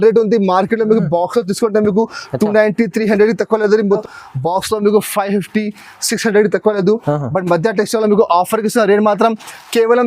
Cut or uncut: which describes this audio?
cut